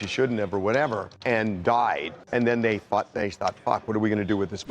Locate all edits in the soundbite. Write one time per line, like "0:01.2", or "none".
0:01.1
0:02.1

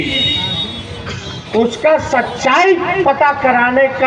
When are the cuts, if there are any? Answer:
none

